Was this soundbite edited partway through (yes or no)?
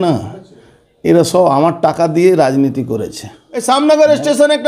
yes